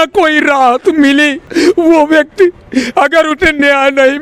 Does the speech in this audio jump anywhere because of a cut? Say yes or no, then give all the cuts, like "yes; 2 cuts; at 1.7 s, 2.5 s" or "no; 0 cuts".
yes; 1 cut; at 1.4 s